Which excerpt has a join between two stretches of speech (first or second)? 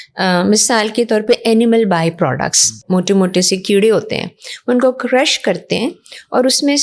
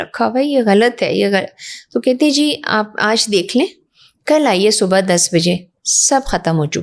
first